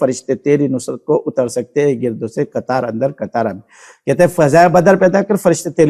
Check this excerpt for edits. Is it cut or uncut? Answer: uncut